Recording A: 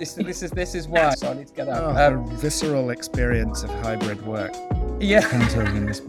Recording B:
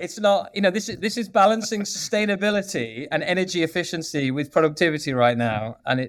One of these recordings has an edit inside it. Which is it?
A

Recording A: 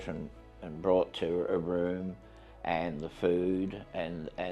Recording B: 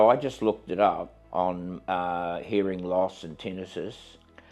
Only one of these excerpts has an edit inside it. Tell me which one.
B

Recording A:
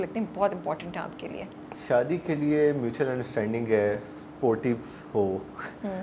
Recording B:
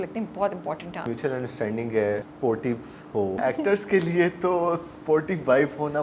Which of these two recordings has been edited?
B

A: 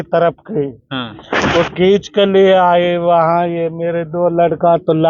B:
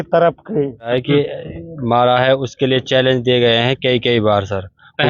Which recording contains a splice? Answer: B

